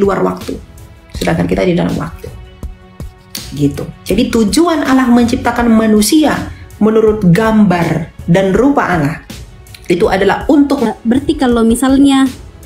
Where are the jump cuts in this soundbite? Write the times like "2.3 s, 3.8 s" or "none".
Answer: 10.9 s